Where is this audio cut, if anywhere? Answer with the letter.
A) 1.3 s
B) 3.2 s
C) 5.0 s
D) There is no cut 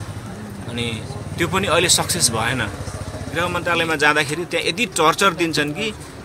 B